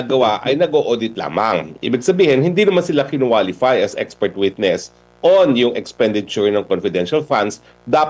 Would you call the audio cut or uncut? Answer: uncut